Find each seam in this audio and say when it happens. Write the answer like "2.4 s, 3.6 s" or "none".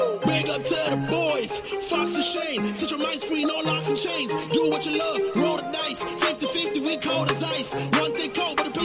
none